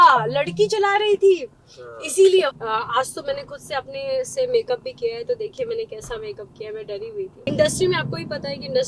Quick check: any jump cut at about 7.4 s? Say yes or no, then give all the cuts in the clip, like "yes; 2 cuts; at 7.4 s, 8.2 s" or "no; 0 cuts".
yes; 2 cuts; at 2.6 s, 7.4 s